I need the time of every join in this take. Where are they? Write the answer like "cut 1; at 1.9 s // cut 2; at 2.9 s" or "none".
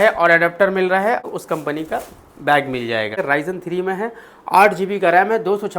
cut 1; at 1.2 s // cut 2; at 3.2 s